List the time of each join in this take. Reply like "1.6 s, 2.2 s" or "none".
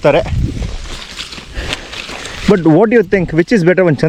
none

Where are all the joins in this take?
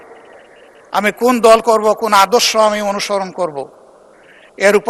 none

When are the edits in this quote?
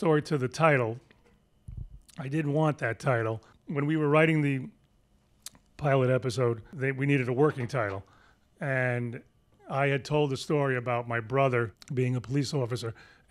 3.5 s, 6.7 s, 11.8 s

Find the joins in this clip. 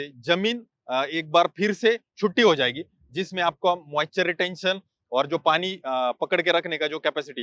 none

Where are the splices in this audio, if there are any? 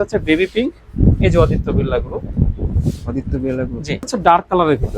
4.0 s

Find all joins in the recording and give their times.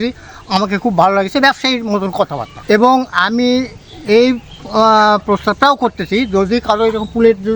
2.5 s

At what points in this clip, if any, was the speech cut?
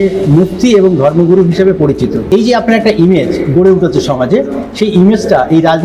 2.2 s

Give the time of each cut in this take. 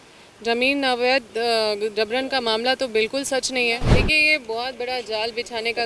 3.9 s

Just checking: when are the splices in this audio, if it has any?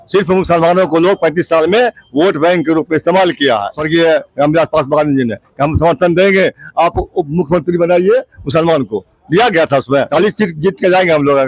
3.8 s, 10.1 s

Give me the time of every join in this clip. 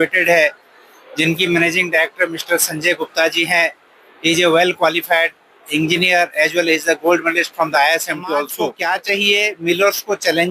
8.8 s

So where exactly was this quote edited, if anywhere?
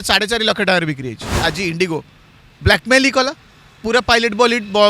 1.3 s

